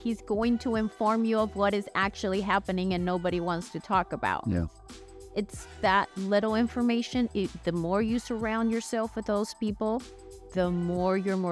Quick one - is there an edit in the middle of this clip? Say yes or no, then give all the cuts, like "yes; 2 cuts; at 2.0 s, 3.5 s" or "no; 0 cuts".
no; 0 cuts